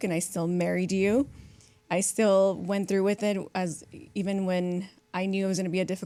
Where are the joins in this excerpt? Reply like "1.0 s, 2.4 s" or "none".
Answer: none